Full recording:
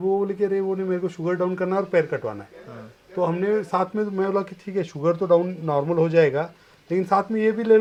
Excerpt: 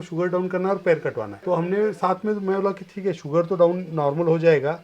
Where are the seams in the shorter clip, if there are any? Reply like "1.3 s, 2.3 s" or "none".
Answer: 1.3 s